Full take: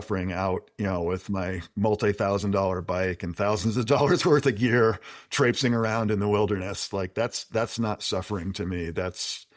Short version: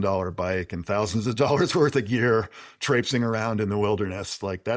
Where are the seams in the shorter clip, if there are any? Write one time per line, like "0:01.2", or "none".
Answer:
none